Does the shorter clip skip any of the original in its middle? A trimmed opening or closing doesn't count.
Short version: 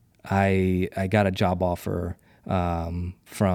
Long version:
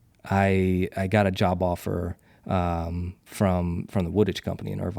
no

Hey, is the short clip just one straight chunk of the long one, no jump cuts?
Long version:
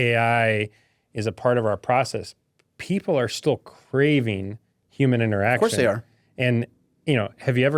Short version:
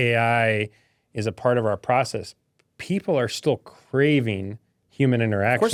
yes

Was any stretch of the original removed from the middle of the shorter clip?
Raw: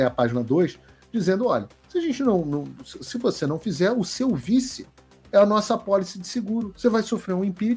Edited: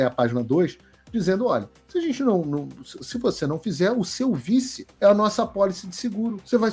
yes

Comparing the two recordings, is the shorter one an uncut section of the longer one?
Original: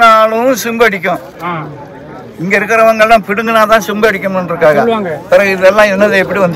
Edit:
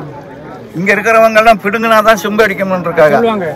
yes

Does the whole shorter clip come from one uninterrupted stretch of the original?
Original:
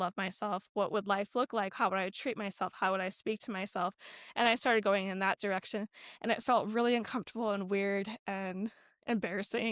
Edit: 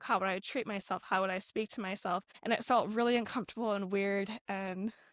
no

